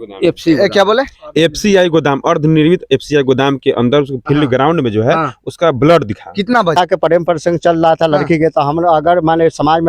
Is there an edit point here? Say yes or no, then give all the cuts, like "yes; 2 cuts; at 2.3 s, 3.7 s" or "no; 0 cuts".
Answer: yes; 1 cut; at 6.7 s